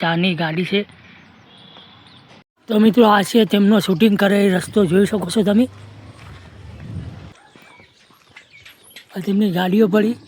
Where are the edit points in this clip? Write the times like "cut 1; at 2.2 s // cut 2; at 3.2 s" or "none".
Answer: cut 1; at 2.7 s // cut 2; at 7.3 s // cut 3; at 9.1 s